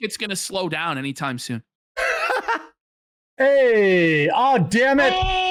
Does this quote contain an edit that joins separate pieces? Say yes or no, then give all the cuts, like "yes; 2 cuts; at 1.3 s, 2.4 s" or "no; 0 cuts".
no; 0 cuts